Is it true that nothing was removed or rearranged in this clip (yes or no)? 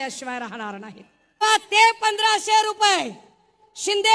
no